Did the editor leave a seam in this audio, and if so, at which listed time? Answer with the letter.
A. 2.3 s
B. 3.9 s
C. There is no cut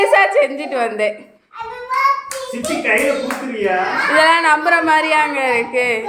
B